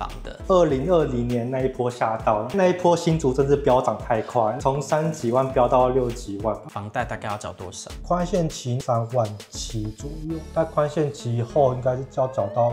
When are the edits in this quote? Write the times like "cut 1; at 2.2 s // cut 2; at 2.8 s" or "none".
cut 1; at 6.7 s // cut 2; at 8.8 s